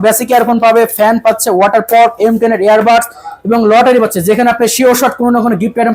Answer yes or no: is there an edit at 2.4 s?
no